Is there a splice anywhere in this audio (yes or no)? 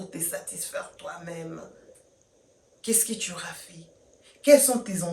no